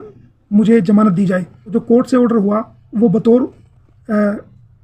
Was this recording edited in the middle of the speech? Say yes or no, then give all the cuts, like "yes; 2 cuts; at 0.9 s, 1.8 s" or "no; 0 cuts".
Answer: no; 0 cuts